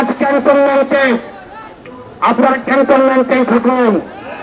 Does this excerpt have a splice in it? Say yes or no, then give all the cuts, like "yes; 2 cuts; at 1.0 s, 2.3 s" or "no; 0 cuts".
no; 0 cuts